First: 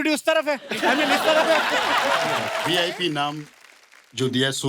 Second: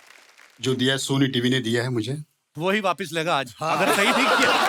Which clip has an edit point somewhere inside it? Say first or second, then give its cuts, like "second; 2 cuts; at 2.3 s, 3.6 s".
first; 1 cut; at 2.6 s